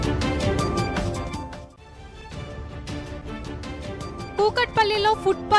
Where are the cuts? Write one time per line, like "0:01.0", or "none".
none